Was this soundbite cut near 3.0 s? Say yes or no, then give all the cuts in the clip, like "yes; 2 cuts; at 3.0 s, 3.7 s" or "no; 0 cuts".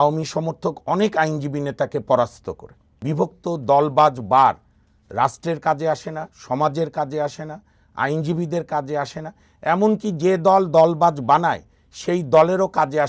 yes; 1 cut; at 3.0 s